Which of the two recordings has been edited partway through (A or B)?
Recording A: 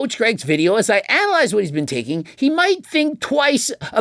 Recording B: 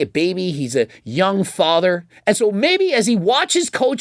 B